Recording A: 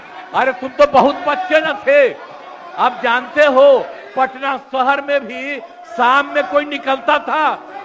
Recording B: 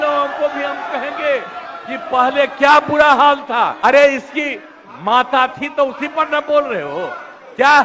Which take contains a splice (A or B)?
B